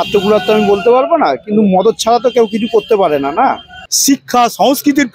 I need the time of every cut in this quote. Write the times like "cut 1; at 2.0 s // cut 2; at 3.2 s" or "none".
cut 1; at 3.8 s